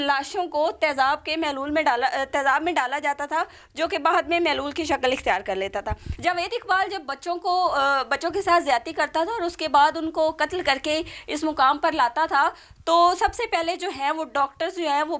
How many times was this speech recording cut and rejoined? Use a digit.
1